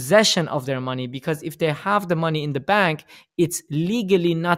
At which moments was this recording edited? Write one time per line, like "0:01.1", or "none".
none